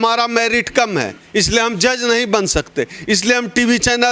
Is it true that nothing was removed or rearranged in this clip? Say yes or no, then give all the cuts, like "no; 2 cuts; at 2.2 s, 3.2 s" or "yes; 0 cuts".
yes; 0 cuts